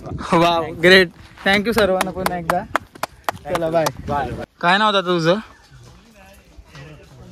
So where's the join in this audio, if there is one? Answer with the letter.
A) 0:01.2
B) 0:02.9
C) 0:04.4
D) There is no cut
C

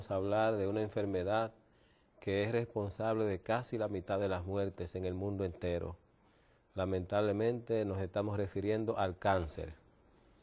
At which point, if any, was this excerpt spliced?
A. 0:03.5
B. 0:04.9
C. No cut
A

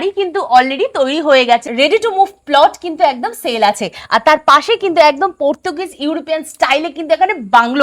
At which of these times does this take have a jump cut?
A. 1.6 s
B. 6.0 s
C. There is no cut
A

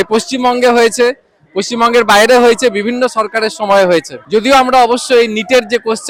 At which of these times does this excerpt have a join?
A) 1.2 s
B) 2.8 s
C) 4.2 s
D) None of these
D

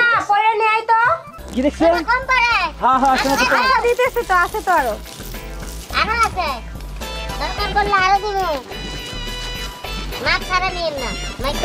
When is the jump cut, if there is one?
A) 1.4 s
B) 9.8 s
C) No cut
A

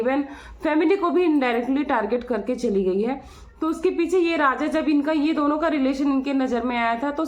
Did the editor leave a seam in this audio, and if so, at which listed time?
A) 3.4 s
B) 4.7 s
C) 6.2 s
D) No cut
D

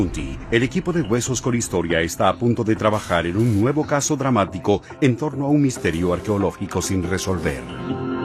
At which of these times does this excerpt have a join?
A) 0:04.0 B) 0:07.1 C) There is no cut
C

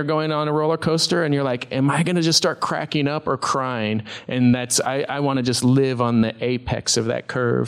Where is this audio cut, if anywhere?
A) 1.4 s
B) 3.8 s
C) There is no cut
C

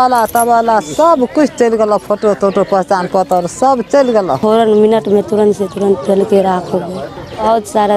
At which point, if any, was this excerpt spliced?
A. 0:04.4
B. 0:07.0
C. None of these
A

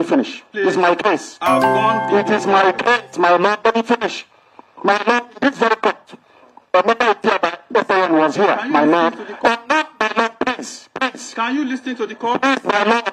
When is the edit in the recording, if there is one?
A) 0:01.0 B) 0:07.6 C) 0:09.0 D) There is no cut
C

